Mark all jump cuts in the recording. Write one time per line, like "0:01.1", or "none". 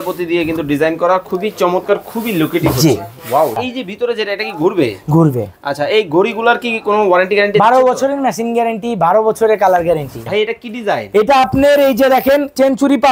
0:03.6
0:10.3